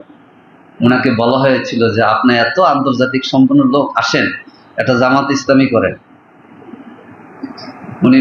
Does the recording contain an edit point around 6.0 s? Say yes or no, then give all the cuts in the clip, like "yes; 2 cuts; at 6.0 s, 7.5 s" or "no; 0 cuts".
no; 0 cuts